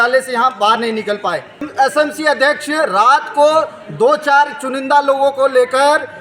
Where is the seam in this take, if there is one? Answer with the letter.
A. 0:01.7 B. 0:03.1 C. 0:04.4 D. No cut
A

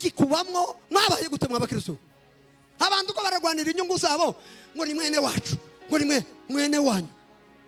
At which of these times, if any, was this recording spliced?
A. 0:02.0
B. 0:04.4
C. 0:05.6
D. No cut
D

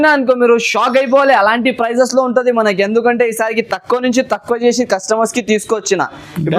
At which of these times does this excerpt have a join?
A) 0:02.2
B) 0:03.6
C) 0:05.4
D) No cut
D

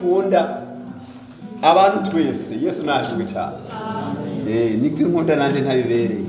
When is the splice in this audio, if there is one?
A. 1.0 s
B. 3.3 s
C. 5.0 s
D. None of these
D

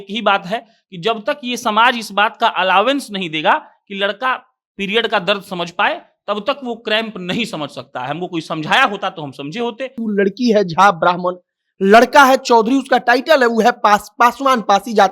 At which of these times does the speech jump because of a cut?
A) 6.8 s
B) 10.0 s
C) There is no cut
B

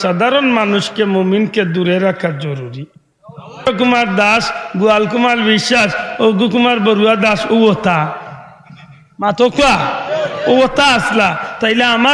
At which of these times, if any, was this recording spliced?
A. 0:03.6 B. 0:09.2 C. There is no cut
A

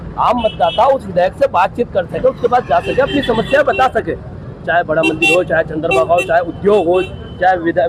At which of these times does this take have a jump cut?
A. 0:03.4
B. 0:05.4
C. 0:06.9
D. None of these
D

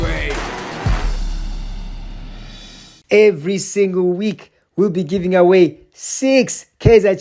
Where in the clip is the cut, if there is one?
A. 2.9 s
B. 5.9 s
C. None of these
A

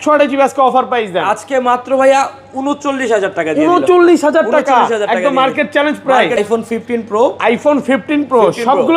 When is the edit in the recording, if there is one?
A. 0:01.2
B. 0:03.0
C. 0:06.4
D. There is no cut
C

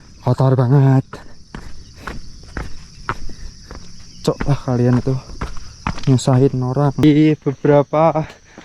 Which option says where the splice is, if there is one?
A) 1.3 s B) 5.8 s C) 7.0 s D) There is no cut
C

